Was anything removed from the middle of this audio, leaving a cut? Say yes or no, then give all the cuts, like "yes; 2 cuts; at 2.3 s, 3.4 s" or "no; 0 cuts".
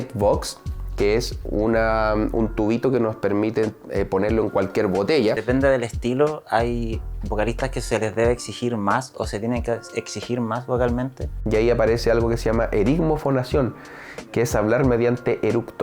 yes; 2 cuts; at 5.4 s, 11.3 s